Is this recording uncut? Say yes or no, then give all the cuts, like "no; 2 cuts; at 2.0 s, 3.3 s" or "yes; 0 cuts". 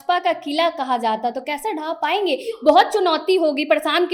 yes; 0 cuts